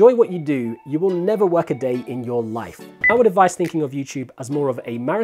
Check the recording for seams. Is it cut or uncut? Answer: cut